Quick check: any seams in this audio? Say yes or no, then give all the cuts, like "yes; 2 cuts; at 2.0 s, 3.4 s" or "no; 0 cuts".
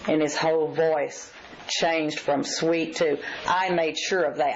no; 0 cuts